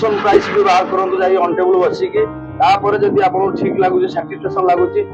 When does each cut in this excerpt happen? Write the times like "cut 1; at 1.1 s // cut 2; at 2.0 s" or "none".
none